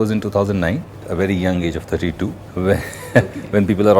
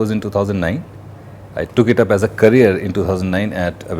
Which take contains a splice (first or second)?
first